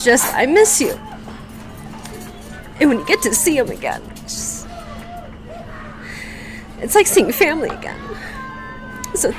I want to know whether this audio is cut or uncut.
uncut